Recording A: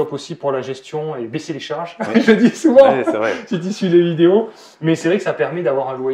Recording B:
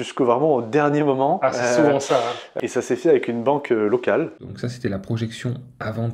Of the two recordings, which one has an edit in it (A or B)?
B